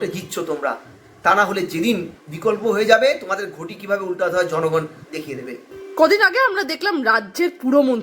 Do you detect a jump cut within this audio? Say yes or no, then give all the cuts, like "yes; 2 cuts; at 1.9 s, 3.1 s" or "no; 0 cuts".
no; 0 cuts